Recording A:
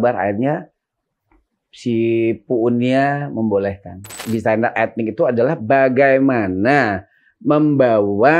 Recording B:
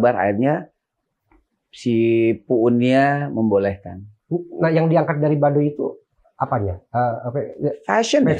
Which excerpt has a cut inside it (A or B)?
A